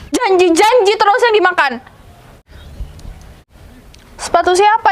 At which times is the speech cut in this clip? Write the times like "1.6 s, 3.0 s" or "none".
2.4 s, 3.5 s